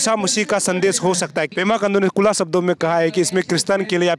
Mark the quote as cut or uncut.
cut